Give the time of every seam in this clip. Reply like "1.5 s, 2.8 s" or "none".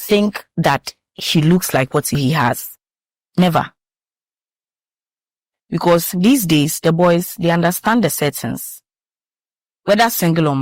2.2 s